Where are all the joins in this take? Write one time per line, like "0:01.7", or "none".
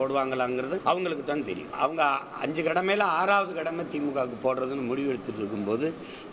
0:00.8
0:01.7